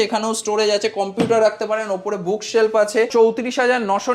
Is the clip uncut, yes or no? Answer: no